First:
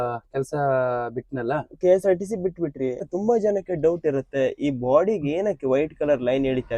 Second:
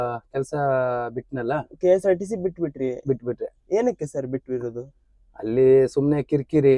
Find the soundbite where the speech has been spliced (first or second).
first